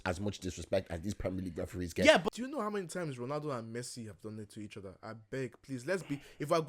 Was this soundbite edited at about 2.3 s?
yes; 1 cut; at 2.3 s

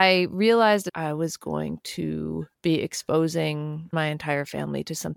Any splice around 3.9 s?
yes; 3 cuts; at 0.9 s, 2.5 s, 3.9 s

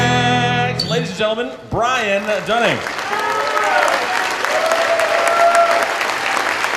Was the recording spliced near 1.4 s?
no; 1 cut; at 3.2 s

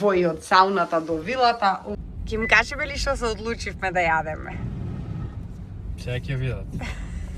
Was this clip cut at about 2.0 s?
yes; 1 cut; at 2.0 s

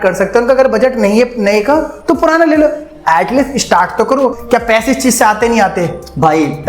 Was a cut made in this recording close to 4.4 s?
yes; 1 cut; at 4.4 s

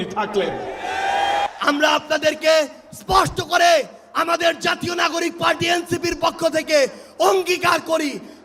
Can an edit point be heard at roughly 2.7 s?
no; 1 cut; at 1.5 s

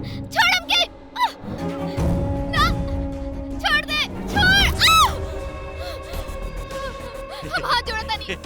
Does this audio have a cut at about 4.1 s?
yes; 2 cuts; at 1.6 s, 4.1 s

